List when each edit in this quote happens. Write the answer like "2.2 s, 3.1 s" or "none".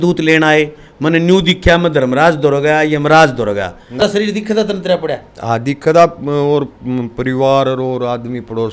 4.0 s